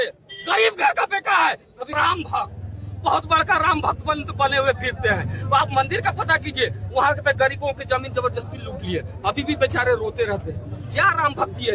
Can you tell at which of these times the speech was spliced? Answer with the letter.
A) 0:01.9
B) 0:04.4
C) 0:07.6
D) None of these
A